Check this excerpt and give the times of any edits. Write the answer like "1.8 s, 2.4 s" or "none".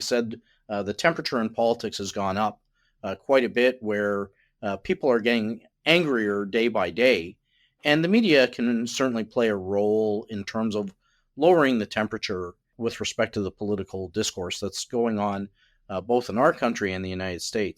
5.7 s, 12.7 s